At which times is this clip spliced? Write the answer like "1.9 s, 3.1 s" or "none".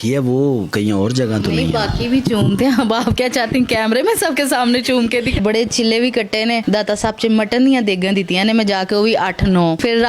5.4 s